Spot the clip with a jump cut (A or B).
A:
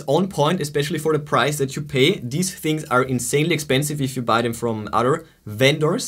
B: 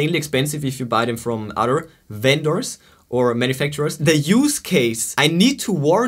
B